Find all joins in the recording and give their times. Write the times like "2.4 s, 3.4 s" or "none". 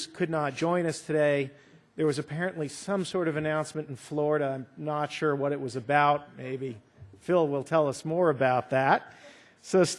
none